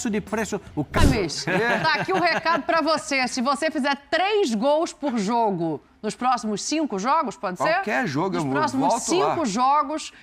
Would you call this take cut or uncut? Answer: cut